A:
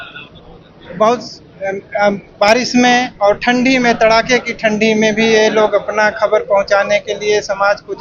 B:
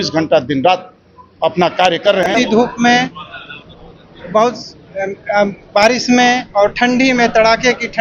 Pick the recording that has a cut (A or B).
B